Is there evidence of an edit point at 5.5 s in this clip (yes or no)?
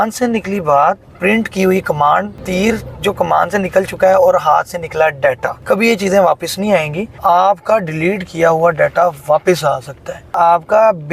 yes